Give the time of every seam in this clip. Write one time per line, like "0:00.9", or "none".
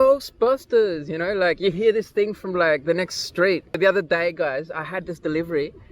0:03.8